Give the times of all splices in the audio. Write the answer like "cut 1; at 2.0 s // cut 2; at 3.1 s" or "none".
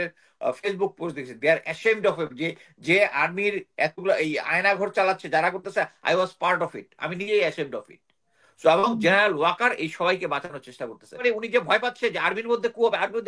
cut 1; at 11.2 s